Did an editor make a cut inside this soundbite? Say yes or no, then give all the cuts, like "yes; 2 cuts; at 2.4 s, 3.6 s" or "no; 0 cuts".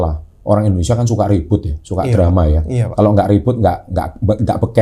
no; 0 cuts